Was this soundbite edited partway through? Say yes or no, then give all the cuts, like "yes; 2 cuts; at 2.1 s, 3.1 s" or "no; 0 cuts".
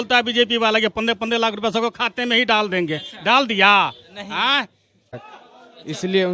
yes; 1 cut; at 5.1 s